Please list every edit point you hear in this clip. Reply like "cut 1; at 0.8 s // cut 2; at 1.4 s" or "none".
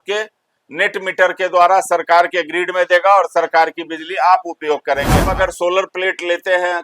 cut 1; at 5.3 s